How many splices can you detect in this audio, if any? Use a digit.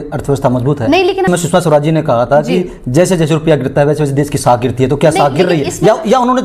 1